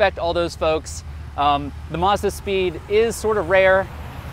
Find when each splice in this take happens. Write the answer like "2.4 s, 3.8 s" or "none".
none